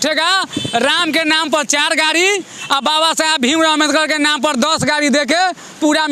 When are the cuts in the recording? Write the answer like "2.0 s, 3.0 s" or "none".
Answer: none